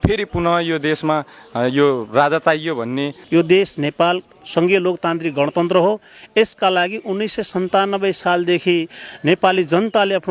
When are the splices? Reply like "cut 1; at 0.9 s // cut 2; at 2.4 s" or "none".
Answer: cut 1; at 3.2 s